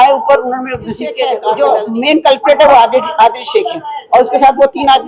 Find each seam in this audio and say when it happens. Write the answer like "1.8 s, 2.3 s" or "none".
1.3 s